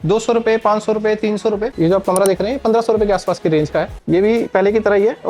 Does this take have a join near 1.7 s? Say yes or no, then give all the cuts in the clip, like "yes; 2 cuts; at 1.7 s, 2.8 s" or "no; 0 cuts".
yes; 2 cuts; at 1.7 s, 3.9 s